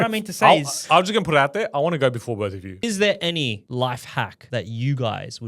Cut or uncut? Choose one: cut